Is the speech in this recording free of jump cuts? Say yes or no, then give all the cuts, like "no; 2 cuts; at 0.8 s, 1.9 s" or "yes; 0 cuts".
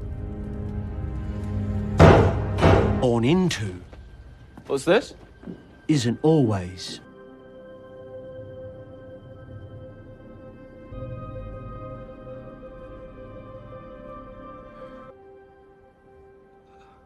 yes; 0 cuts